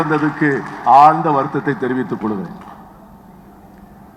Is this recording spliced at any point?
no; 0 cuts

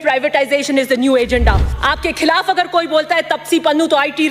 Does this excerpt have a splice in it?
yes; 1 cut; at 1.7 s

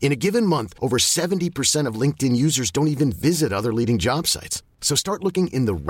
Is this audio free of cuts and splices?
yes; 0 cuts

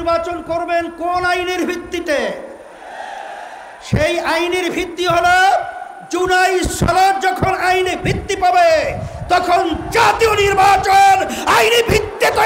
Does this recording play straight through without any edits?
yes; 0 cuts

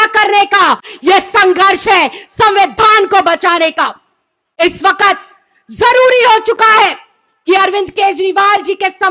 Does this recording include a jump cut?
no; 0 cuts

